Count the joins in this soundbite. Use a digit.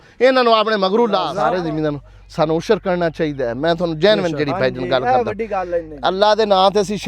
1